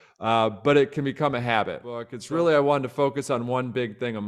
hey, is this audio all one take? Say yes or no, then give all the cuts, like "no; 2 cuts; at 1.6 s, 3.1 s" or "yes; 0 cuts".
no; 1 cut; at 2.1 s